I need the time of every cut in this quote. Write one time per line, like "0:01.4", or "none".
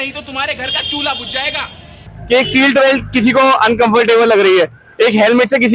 0:02.1